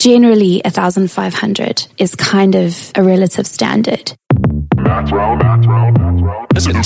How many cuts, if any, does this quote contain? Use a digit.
3